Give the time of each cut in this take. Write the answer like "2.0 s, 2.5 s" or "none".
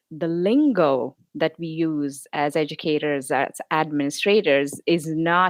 none